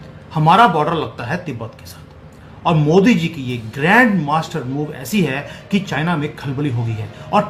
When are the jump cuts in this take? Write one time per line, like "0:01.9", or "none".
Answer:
none